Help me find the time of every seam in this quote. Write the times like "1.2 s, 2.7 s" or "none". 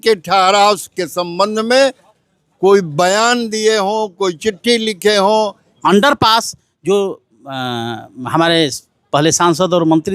5.7 s